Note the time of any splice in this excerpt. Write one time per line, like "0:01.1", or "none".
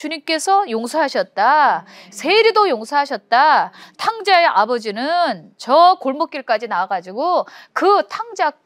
none